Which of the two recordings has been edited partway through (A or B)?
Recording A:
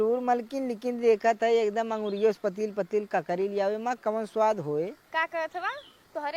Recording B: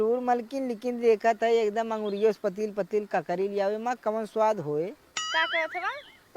A